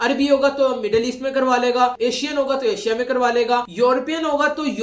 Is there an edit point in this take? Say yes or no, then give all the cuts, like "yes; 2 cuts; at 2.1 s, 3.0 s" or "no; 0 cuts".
no; 0 cuts